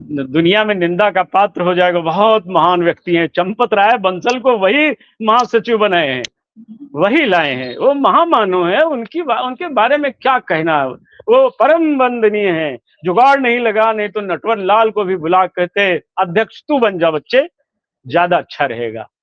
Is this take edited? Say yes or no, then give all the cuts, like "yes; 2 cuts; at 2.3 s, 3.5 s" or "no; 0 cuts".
no; 0 cuts